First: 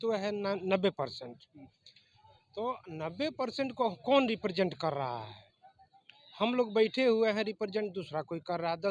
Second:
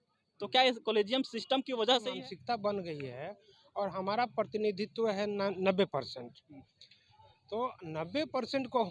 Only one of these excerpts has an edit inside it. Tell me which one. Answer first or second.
second